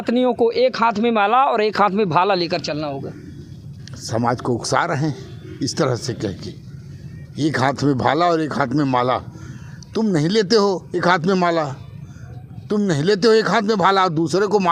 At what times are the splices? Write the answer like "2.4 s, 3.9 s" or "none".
none